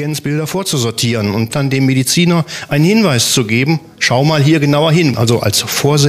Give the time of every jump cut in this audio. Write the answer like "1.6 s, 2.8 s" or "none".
1.5 s, 5.1 s

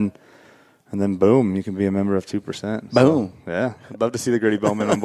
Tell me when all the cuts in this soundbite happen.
none

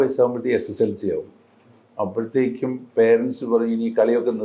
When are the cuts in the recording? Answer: none

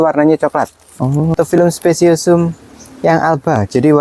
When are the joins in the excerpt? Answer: 1.3 s

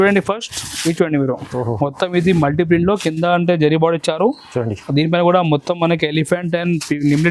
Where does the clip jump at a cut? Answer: 1.4 s

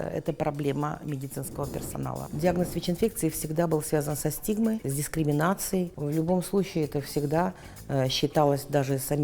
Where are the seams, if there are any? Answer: 2.2 s, 4.9 s, 6.0 s

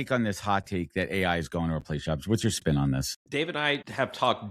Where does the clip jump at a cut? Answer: 3.2 s

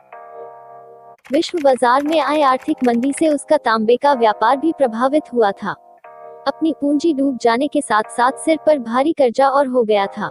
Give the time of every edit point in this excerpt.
1.3 s

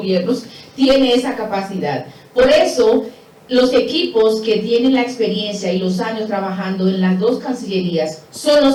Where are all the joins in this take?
none

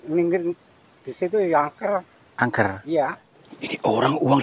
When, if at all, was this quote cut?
3.3 s

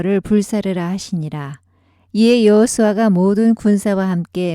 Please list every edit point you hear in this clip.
1.3 s

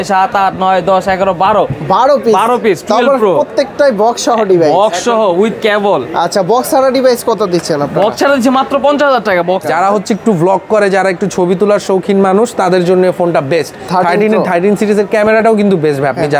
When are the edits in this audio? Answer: 9.6 s

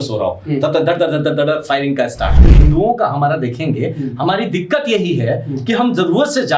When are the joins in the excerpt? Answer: 2.5 s

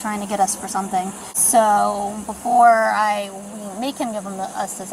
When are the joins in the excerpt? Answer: 1.3 s

